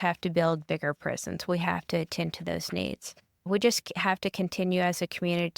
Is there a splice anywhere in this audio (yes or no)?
yes